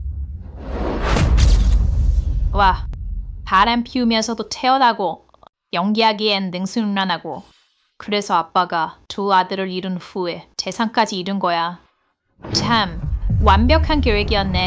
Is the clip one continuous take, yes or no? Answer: yes